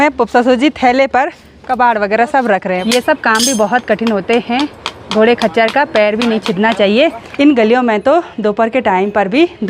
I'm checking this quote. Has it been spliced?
yes; 2 cuts; at 2.8 s, 7.3 s

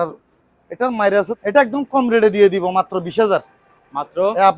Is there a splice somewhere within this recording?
yes; 1 cut; at 1.3 s

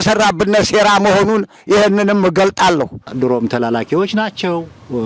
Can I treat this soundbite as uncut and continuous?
no; 1 cut; at 3.0 s

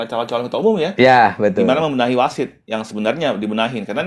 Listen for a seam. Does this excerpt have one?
no; 0 cuts

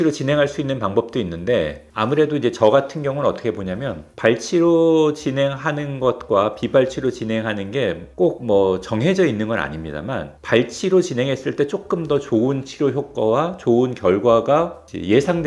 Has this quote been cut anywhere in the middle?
no; 0 cuts

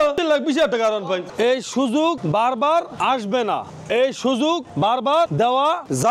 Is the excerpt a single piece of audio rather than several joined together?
no; 1 cut; at 1.3 s

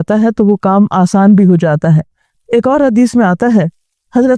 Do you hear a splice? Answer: no; 0 cuts

